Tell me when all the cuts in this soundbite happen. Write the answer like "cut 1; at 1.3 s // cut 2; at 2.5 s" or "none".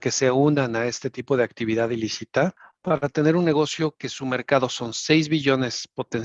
cut 1; at 2.7 s